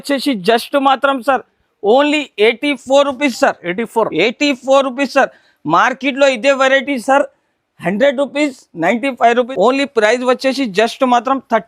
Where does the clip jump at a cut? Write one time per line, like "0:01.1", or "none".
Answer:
0:09.5